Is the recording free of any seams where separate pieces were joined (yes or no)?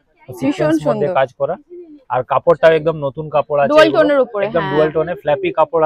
yes